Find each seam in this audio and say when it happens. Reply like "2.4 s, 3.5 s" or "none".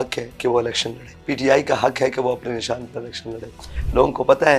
1.1 s, 3.7 s